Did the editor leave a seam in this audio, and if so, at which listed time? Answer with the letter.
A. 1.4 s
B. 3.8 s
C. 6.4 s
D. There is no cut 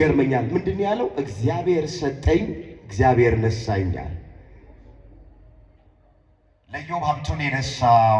D